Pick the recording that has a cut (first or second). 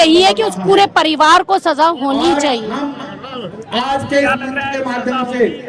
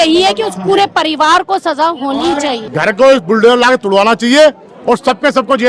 second